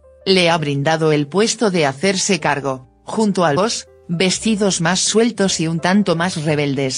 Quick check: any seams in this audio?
no; 0 cuts

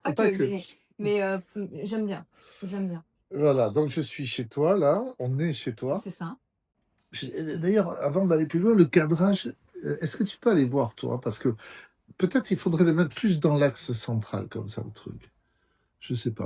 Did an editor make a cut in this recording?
no; 0 cuts

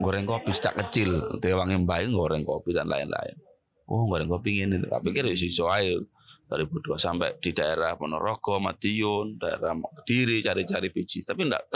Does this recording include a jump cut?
no; 0 cuts

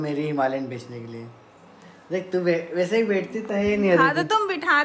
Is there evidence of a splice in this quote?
no; 0 cuts

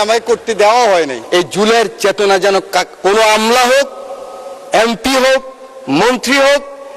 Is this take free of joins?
no; 1 cut; at 1.2 s

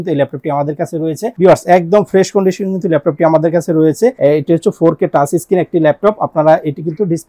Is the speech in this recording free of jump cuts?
no; 2 cuts; at 1.3 s, 4.2 s

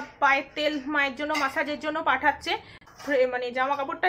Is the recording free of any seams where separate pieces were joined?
no; 1 cut; at 2.8 s

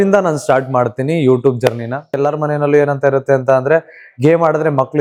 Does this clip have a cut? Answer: yes; 1 cut; at 2.2 s

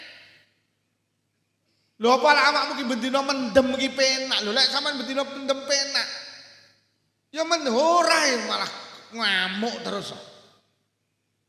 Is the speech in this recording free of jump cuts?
yes; 0 cuts

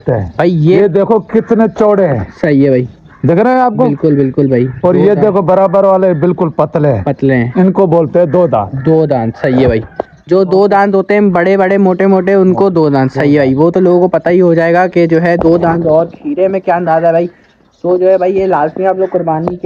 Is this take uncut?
yes; 0 cuts

